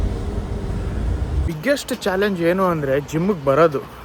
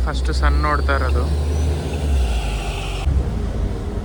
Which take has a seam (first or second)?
first